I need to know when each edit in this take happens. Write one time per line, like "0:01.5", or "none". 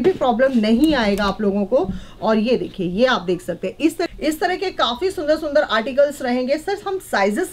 0:04.1